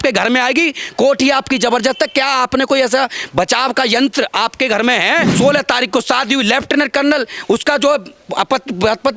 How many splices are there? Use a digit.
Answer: 1